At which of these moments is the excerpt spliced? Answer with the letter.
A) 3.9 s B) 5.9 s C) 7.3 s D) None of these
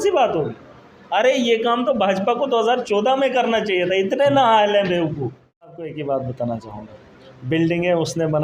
B